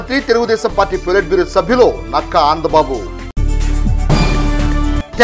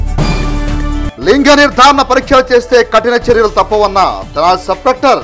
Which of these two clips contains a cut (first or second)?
second